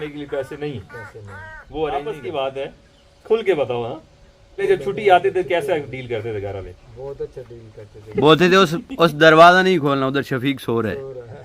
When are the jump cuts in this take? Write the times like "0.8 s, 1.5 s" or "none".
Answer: 2.1 s, 4.6 s, 8.1 s